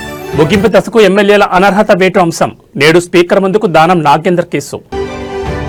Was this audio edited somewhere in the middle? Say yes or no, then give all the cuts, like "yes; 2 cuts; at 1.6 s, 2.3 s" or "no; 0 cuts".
no; 0 cuts